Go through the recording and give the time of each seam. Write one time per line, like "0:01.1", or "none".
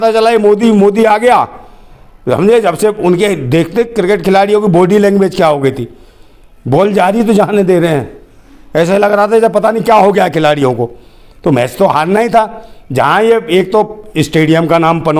none